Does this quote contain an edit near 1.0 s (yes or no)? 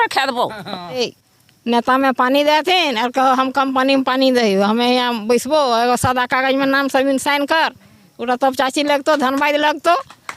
yes